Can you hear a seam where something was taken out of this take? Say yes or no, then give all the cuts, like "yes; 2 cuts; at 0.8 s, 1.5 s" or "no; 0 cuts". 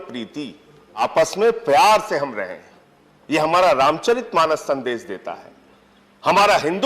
yes; 1 cut; at 1.0 s